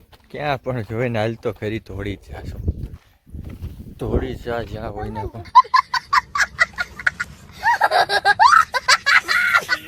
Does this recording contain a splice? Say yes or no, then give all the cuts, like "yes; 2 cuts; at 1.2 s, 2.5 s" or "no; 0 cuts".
no; 0 cuts